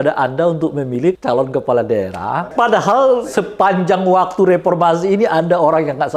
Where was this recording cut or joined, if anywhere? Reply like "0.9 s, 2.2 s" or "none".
1.2 s, 2.5 s, 3.4 s